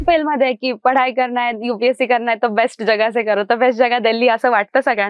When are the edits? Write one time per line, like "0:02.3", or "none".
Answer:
none